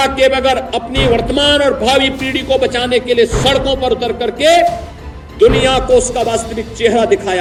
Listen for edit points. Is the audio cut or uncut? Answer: uncut